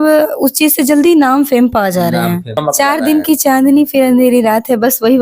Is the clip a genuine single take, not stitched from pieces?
no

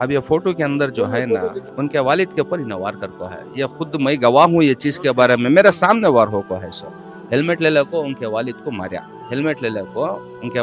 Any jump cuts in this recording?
yes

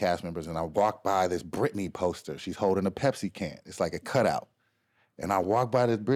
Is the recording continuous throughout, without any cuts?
yes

